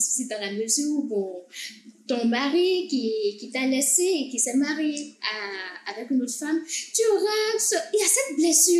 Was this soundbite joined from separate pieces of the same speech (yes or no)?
no